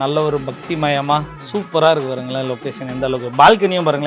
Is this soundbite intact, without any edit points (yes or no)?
no